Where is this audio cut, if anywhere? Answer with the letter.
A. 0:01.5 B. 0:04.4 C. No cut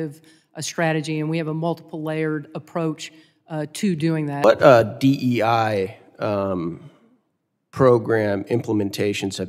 B